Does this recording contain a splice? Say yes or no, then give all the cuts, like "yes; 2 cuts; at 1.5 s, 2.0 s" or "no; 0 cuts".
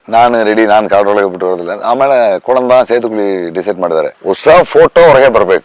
yes; 1 cut; at 4.2 s